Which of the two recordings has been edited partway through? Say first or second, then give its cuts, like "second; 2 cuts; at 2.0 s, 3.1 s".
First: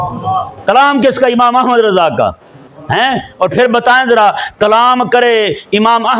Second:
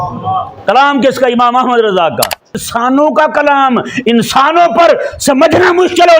second; 1 cut; at 2.7 s